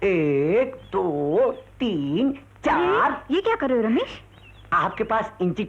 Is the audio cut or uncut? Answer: uncut